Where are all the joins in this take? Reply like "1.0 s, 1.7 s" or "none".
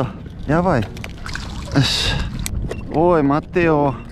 1.2 s, 2.5 s